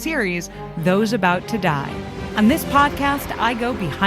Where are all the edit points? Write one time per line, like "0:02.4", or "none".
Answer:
0:02.2